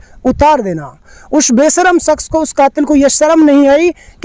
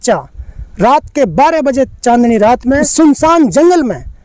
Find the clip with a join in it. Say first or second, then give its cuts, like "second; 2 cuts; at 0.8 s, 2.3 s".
second; 1 cut; at 2.9 s